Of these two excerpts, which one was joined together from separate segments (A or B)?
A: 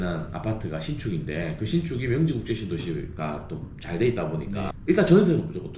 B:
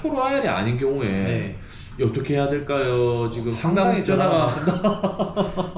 A